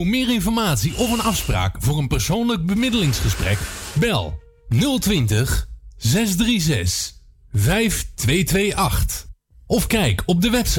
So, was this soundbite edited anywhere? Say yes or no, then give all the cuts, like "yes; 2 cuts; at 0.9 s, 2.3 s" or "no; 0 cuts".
no; 0 cuts